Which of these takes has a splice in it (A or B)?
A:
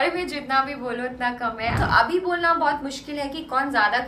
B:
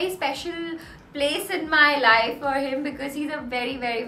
A